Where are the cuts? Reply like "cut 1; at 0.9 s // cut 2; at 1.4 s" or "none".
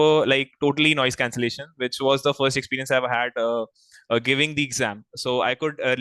none